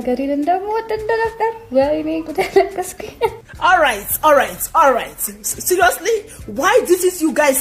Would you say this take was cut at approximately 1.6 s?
no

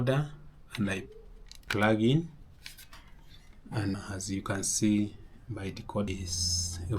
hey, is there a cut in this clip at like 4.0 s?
yes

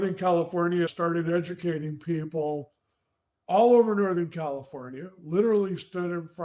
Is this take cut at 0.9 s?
yes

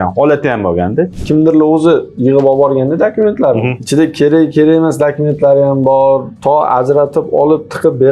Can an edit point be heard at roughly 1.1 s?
yes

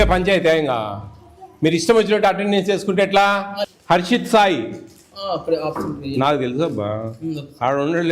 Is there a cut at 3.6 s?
yes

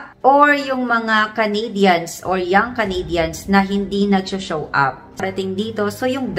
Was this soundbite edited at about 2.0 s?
no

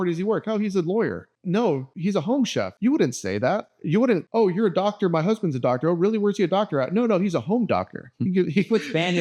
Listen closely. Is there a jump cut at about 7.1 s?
no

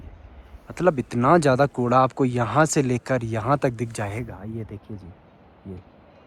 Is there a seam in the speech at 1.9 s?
no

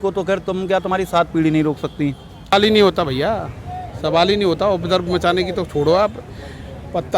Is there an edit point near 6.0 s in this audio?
no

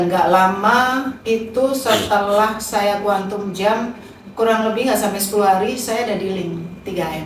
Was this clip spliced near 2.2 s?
no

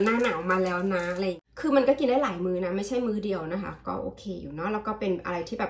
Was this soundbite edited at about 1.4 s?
yes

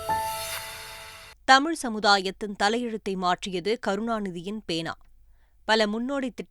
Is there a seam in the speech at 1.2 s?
yes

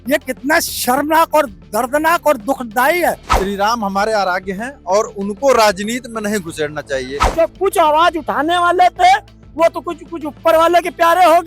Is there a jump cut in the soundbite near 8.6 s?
no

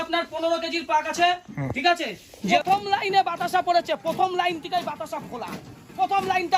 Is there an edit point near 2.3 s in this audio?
yes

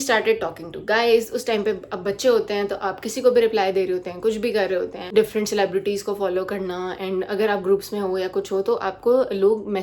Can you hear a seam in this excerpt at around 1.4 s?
no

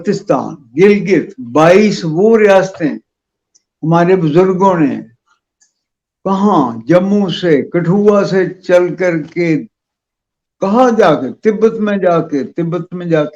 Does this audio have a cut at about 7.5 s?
no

